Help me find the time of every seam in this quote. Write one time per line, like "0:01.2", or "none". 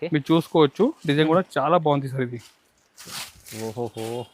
none